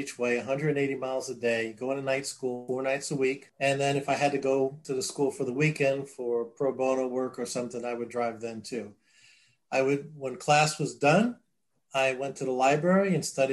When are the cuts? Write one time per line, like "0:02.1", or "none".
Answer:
0:02.6
0:03.5
0:04.8